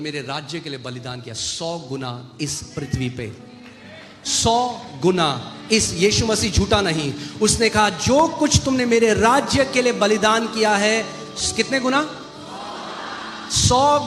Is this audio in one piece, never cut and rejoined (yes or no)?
yes